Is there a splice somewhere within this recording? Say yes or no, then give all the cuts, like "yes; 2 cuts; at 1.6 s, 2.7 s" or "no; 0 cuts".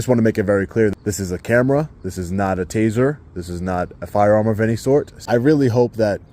yes; 2 cuts; at 0.9 s, 5.1 s